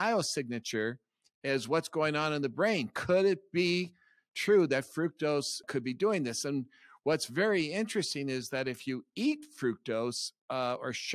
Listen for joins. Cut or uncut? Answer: cut